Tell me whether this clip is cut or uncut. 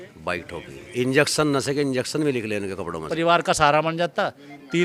cut